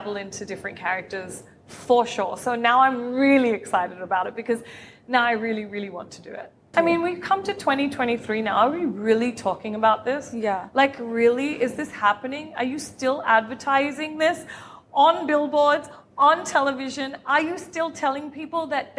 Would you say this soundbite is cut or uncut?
cut